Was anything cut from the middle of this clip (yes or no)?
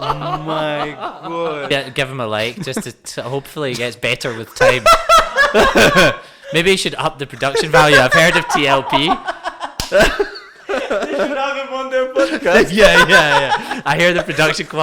yes